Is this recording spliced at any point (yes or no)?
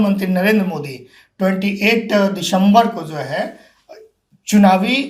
no